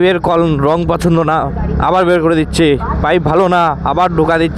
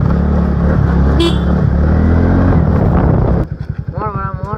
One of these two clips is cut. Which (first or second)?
second